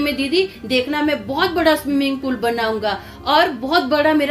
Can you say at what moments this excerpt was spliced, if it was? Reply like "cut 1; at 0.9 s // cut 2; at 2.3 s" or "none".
none